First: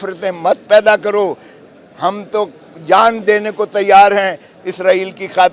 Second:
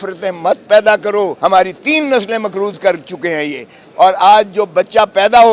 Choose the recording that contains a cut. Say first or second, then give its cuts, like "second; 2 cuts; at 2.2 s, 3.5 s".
second; 1 cut; at 1.3 s